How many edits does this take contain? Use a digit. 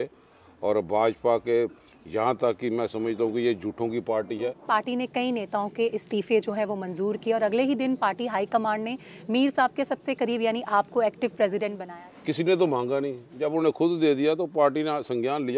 2